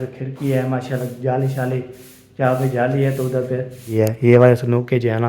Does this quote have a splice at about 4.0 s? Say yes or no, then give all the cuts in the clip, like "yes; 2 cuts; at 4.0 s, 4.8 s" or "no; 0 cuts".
yes; 1 cut; at 4.0 s